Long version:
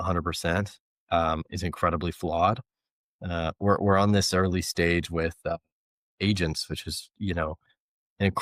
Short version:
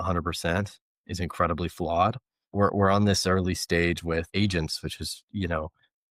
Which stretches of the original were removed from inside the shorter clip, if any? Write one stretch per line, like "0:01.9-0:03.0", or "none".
0:01.0-0:01.4
0:02.9-0:03.5
0:05.4-0:06.1